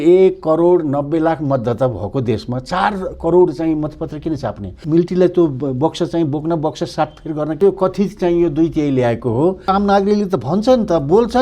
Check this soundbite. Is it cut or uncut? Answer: cut